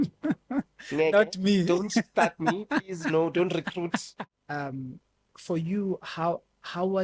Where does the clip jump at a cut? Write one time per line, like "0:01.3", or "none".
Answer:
0:04.2